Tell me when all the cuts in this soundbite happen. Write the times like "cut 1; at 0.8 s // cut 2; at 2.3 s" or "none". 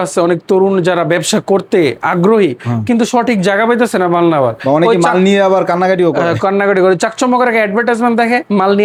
none

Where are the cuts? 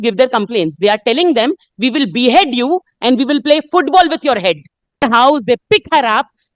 cut 1; at 5.0 s

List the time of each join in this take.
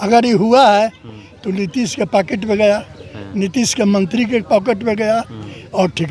none

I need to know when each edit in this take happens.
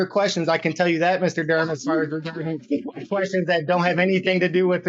none

